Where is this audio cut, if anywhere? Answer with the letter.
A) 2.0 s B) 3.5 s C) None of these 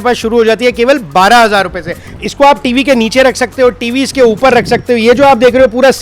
A